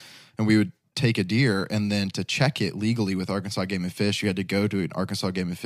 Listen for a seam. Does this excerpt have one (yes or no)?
no